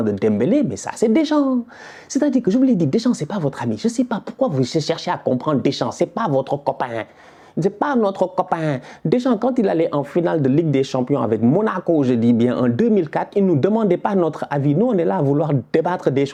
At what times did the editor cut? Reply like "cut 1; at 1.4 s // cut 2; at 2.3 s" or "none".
none